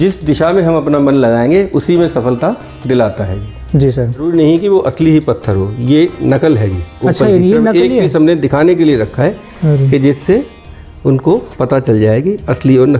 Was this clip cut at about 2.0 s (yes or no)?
no